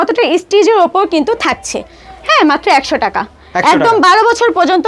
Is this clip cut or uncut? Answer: uncut